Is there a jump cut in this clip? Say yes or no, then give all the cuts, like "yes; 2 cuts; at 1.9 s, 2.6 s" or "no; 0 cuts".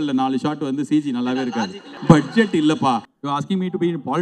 yes; 2 cuts; at 1.9 s, 3.1 s